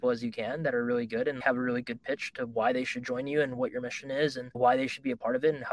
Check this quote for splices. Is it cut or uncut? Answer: cut